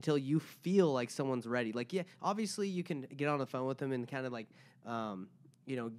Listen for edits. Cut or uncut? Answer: uncut